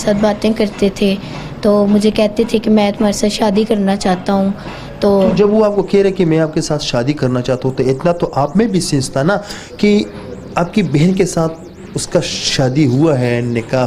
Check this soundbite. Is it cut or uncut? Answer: uncut